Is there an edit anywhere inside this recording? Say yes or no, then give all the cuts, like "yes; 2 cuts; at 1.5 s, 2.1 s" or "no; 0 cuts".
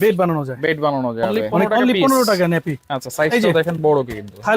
yes; 1 cut; at 1.6 s